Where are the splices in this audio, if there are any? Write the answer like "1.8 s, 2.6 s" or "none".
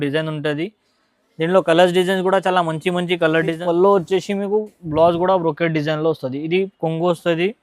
3.6 s